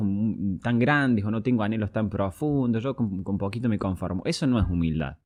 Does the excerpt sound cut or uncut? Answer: uncut